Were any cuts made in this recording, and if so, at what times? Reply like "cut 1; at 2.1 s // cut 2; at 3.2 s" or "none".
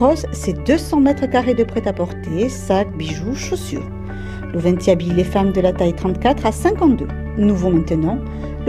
none